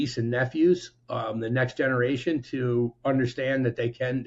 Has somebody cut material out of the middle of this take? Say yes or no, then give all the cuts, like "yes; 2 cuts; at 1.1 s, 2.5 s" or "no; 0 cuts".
no; 0 cuts